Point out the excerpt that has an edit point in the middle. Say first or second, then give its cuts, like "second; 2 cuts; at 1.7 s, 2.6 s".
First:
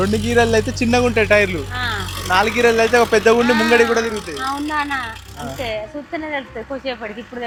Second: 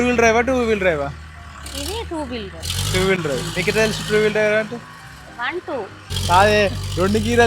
second; 1 cut; at 6.0 s